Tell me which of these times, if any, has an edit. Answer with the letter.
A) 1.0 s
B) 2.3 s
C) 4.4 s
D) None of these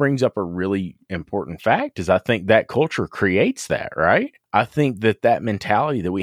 C